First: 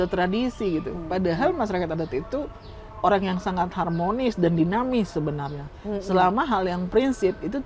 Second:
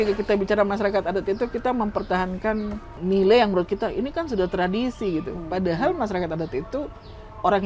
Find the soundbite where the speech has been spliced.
second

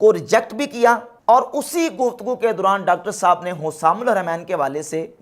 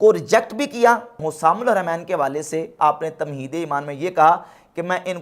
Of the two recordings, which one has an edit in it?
second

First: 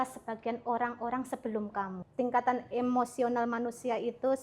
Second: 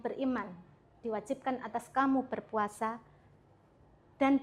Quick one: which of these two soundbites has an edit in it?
first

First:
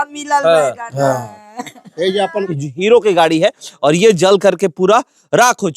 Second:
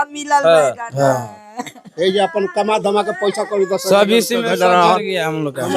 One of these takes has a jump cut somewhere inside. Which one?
first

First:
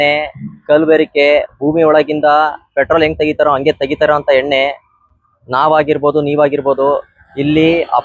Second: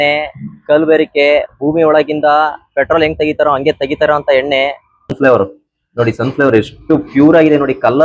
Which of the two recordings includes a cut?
second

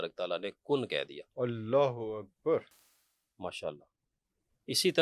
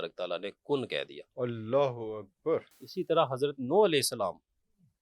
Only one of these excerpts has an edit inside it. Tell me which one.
second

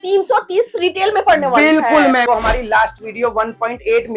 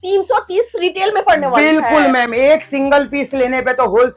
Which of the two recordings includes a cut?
first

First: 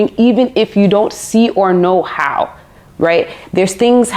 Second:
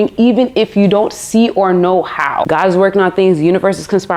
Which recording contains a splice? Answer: second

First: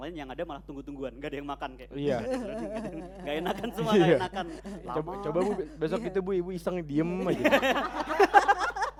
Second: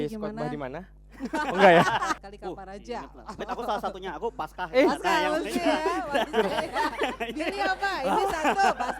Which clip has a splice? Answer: second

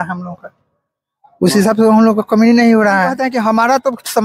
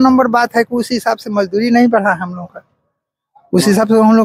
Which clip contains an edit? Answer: first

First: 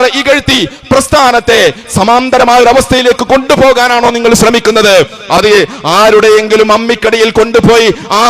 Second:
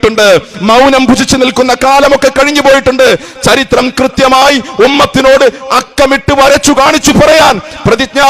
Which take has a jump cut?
first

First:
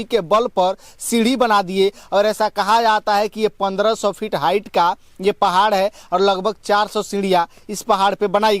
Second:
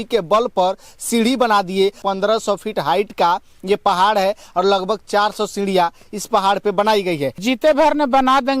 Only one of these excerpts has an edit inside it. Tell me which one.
second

